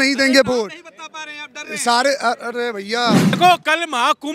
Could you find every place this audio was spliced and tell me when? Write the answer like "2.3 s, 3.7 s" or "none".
3.4 s